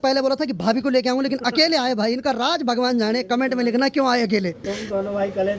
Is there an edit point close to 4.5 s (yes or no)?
yes